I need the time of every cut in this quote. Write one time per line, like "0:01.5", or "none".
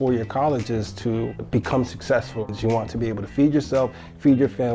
0:02.5

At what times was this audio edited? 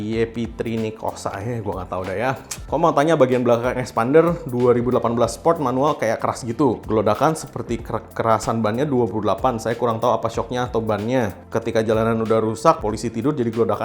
none

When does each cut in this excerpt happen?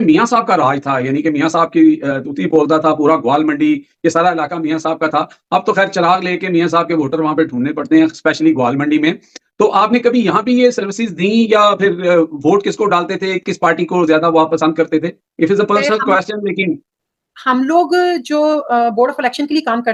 none

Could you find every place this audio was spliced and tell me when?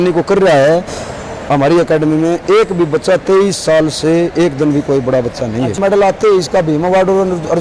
0:05.8

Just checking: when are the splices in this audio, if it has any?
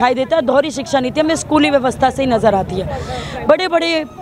none

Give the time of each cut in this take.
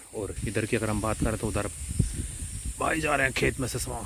none

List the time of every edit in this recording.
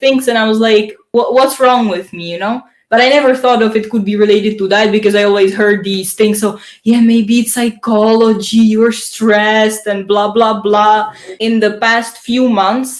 0:01.0
0:11.3

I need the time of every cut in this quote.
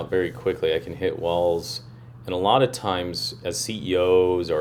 0:03.3

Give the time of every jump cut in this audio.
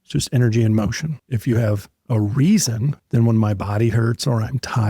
0:01.3
0:02.9

